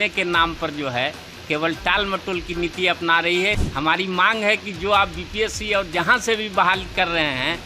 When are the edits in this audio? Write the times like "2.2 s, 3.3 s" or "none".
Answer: 3.6 s